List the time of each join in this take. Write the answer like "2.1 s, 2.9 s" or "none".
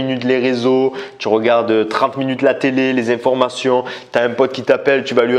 none